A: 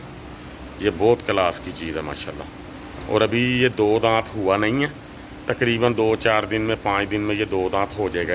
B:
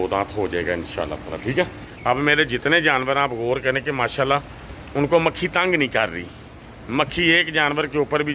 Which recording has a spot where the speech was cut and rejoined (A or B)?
B